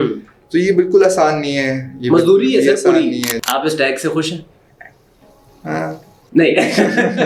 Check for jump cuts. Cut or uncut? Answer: cut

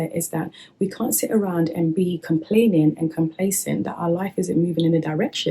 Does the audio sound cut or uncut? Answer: uncut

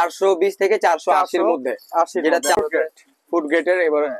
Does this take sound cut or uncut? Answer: cut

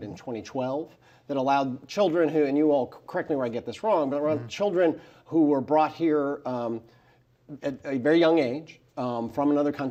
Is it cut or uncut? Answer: uncut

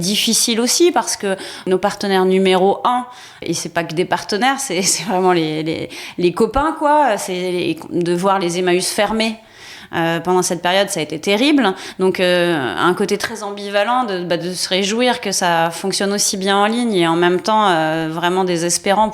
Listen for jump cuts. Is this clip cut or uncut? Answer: cut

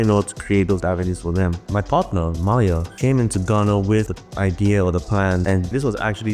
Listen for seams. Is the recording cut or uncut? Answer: cut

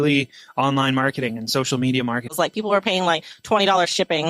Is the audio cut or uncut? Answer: cut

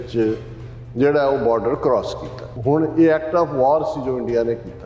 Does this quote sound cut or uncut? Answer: cut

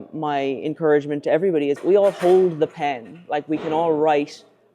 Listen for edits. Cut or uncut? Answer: cut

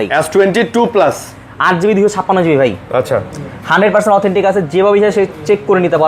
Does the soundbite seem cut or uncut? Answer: uncut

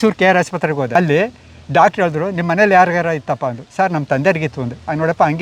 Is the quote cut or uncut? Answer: cut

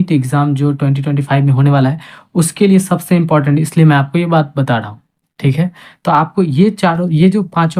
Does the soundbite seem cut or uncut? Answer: uncut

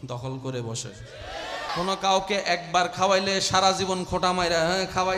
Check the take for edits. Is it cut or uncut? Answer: cut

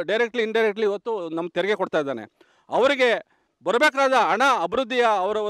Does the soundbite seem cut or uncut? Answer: uncut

